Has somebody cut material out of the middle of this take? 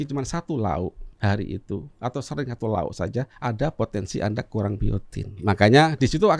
yes; 4 cuts; at 1.1 s, 1.9 s, 3.3 s, 5.4 s

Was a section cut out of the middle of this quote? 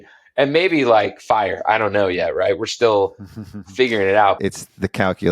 yes; 1 cut; at 4.4 s

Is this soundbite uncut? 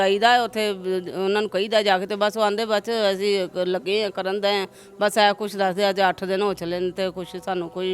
yes; 0 cuts

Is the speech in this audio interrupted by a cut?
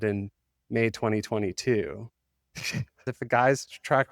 yes; 1 cut; at 3.1 s

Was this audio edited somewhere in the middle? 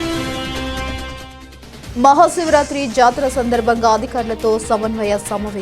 yes; 1 cut; at 1.7 s

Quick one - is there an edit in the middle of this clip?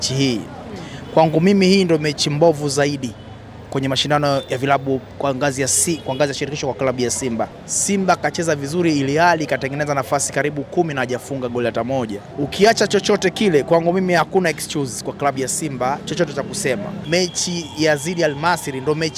yes; 3 cuts; at 7.7 s, 12.2 s, 17.0 s

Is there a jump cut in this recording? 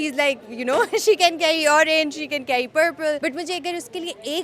yes; 1 cut; at 3.2 s

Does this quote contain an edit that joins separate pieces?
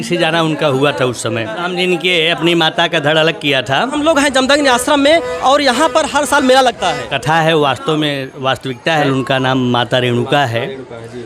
yes; 4 cuts; at 1.6 s, 4.0 s, 7.1 s, 9.0 s

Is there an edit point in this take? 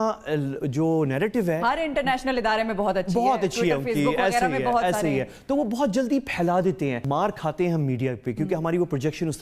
yes; 1 cut; at 7.0 s

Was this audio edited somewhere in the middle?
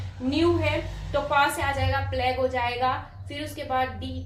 no; 0 cuts

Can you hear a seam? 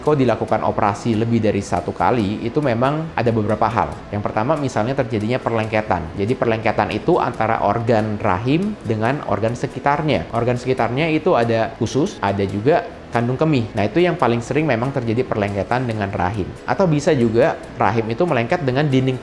no; 0 cuts

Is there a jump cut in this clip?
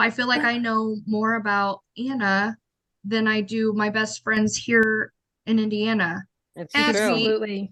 no; 0 cuts

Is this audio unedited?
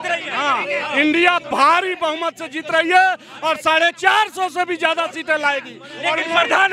yes; 0 cuts

